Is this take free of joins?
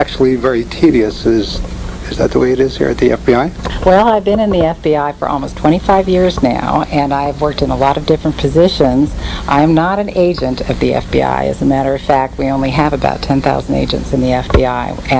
no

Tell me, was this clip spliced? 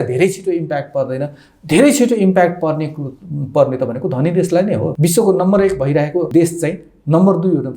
yes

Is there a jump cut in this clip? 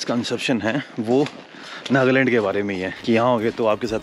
yes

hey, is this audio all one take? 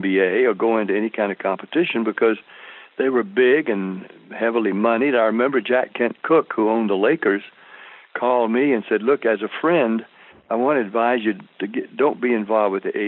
yes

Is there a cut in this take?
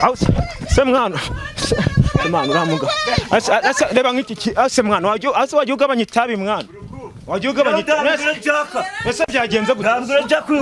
no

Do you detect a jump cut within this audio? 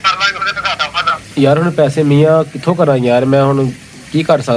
yes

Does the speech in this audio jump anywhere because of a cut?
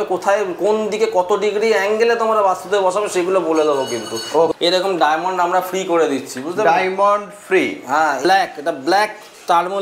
yes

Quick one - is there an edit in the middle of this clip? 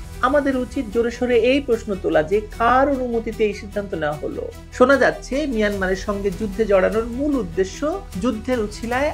yes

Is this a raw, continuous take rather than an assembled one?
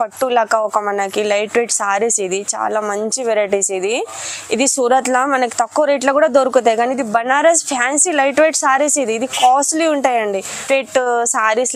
no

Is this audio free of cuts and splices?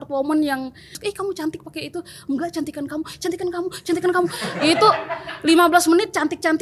no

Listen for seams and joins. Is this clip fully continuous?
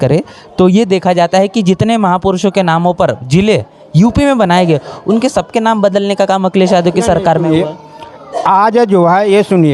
yes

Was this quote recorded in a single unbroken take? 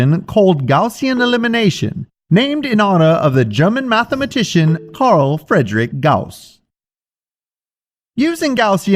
yes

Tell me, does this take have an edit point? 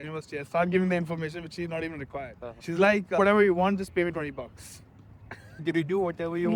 no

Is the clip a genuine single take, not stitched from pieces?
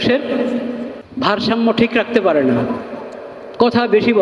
yes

